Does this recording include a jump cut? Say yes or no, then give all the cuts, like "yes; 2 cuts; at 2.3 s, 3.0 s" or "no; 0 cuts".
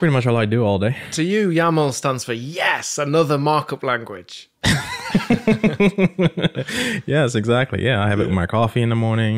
yes; 1 cut; at 1.1 s